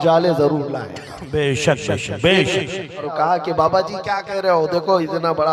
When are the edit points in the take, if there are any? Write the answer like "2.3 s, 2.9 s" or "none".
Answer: 3.1 s